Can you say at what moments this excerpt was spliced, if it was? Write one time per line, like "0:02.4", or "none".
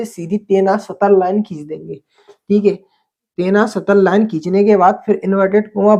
none